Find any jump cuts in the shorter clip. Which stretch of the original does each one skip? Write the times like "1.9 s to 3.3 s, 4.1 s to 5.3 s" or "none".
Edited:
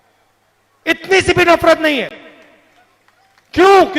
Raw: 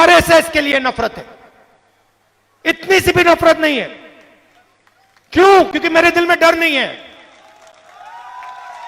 none